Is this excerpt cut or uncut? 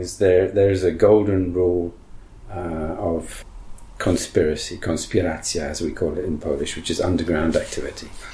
cut